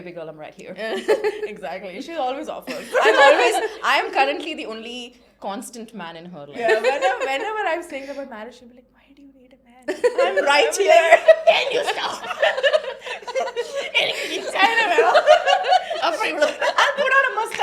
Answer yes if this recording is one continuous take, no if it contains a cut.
yes